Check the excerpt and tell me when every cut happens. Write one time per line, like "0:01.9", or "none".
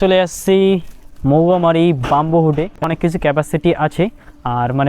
0:02.8